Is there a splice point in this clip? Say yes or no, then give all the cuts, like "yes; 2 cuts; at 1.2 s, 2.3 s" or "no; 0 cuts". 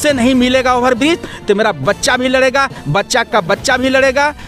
no; 0 cuts